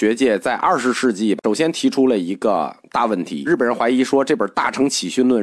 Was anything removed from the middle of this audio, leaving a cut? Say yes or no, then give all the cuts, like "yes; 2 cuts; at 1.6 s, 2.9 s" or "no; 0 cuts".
yes; 1 cut; at 3.5 s